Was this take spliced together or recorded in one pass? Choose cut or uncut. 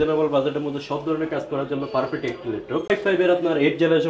cut